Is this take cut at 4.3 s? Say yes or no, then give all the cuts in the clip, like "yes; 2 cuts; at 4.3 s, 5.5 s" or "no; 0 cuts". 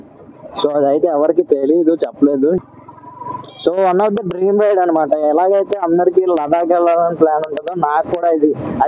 no; 1 cut; at 2.6 s